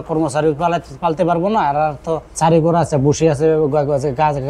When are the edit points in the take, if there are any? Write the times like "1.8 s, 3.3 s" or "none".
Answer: 2.3 s